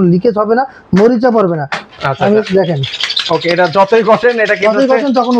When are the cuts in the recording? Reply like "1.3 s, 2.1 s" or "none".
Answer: 1.8 s

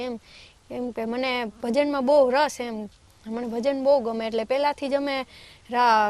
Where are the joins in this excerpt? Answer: none

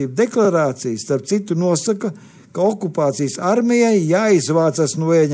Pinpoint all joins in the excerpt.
none

